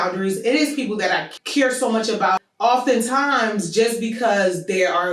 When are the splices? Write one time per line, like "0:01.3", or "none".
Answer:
0:01.4
0:02.4